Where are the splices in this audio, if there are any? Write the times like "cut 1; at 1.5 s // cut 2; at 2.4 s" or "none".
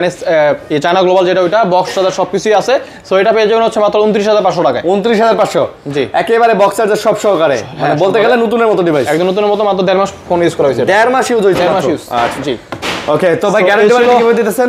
none